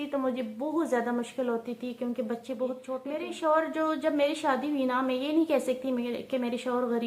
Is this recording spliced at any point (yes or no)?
yes